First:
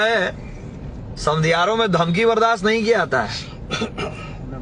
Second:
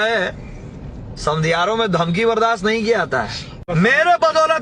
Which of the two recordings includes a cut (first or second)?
second